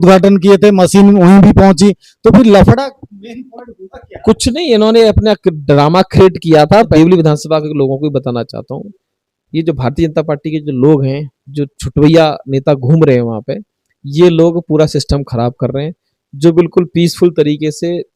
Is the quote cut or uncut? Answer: cut